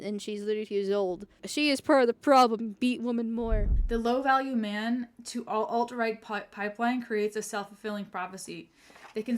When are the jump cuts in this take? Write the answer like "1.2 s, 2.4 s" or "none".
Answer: 1.4 s, 3.7 s